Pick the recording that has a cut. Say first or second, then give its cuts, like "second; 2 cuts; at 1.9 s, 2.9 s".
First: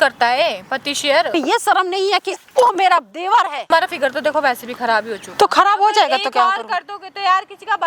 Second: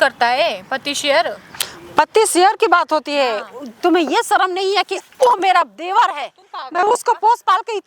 first; 2 cuts; at 1.3 s, 3.6 s